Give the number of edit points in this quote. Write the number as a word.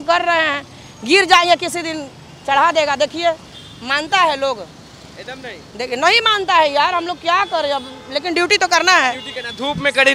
zero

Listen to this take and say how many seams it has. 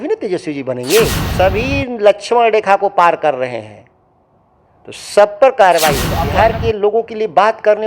two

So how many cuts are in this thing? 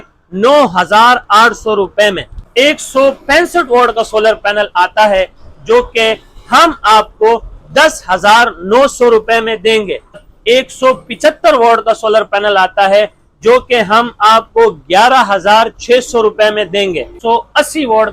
three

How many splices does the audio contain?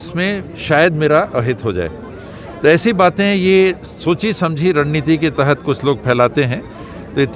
zero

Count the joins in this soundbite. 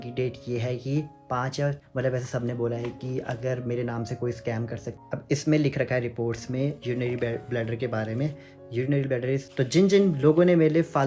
three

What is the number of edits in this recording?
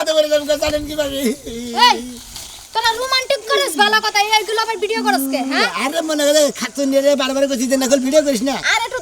zero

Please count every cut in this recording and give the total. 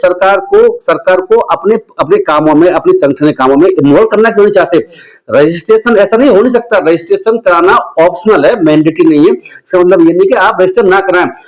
zero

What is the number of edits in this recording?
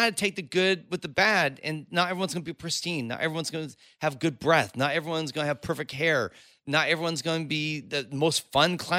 zero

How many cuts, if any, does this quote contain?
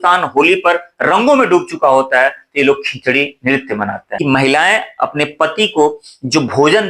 one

